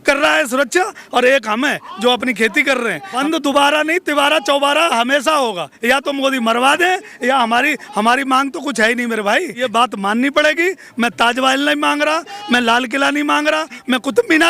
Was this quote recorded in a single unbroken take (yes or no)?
no